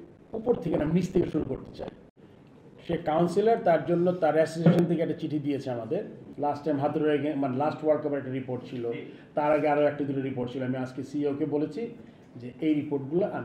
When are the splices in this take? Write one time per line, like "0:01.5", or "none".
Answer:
0:02.0
0:06.2